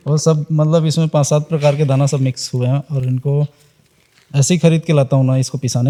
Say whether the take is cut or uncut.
uncut